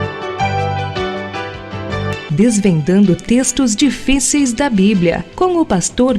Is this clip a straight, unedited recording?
yes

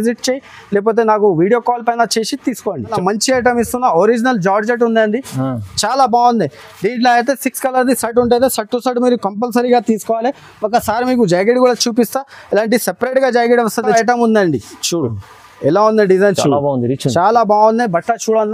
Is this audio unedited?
no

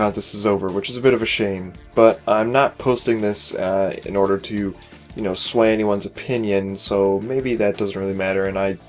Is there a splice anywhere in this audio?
yes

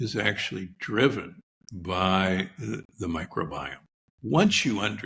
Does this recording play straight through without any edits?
no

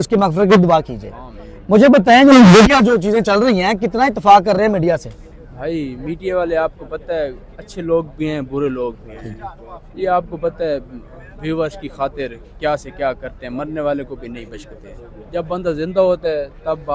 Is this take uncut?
yes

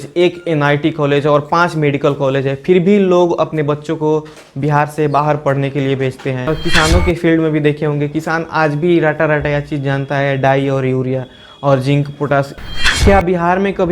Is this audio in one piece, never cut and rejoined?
no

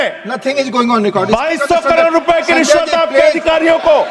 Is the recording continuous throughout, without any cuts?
yes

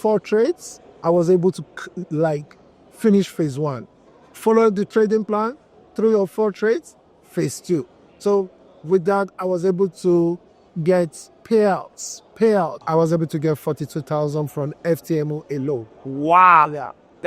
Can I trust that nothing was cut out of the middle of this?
no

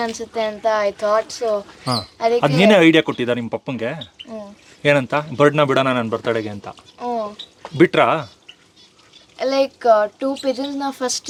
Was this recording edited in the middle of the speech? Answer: no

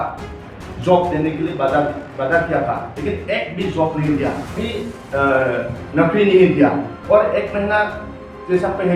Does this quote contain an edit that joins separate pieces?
yes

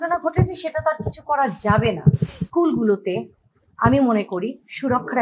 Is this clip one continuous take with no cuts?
no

